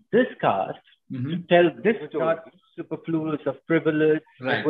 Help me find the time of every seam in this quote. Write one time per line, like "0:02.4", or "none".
0:02.2

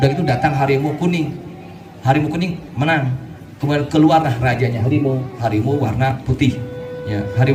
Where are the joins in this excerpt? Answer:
none

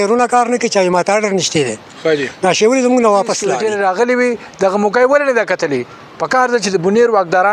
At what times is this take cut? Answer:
0:03.5

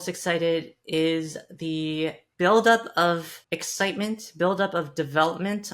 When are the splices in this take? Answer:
0:02.2
0:03.3

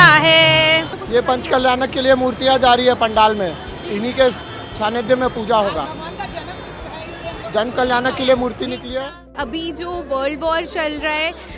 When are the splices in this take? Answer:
0:01.0
0:09.3

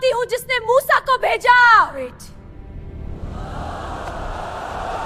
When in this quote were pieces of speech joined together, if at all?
none

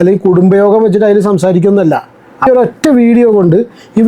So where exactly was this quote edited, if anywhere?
0:02.5

